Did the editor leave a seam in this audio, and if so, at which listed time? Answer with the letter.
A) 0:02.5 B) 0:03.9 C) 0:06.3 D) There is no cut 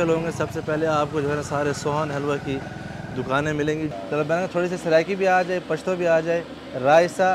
B